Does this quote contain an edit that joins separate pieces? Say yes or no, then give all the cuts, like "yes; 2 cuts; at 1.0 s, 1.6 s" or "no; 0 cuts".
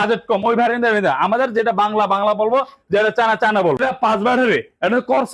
yes; 1 cut; at 3.8 s